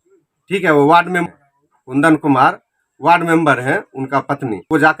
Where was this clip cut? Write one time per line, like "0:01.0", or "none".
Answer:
none